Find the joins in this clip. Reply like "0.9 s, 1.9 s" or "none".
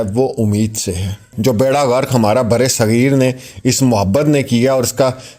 1.3 s